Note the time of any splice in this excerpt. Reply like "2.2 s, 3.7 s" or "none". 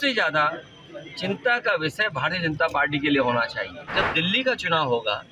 3.9 s

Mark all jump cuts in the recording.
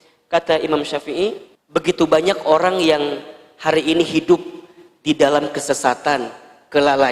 1.5 s

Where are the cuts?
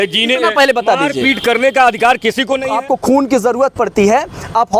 2.6 s

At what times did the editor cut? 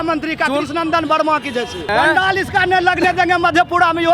1.9 s

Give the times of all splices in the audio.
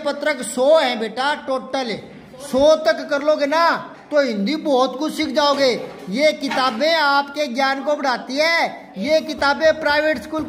none

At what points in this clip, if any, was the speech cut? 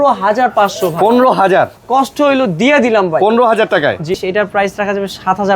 4.1 s

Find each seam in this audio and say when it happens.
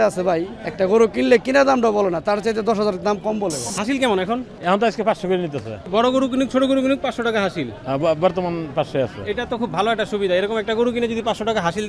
3.7 s, 4.5 s, 5.9 s

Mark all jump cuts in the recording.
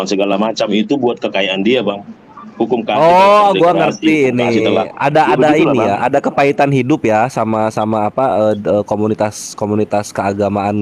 none

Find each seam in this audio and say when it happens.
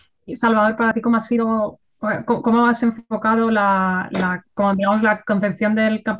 0.9 s

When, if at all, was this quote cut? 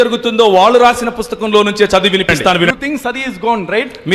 2.7 s

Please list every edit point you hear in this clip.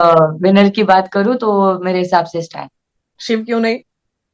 3.1 s

